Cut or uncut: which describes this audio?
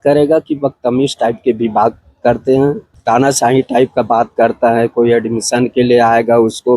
cut